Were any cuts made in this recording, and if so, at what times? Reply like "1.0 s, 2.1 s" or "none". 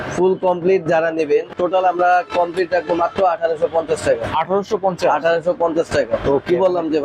1.5 s